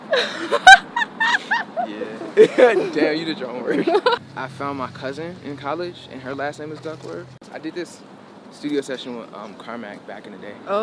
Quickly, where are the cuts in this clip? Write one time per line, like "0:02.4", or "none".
0:04.2
0:07.5